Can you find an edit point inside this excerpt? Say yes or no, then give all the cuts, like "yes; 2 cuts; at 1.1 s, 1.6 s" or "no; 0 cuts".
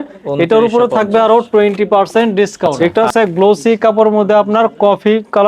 yes; 1 cut; at 2.9 s